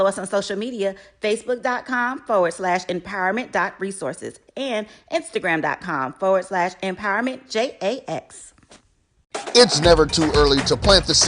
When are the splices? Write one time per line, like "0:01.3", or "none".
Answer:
0:09.0